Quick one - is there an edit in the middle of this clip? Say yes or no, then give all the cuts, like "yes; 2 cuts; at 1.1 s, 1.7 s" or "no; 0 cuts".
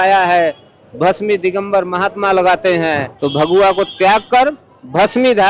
yes; 1 cut; at 3.1 s